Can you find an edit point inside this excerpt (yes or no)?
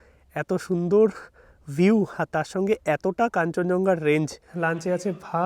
yes